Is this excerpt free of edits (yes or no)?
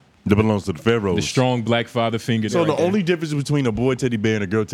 no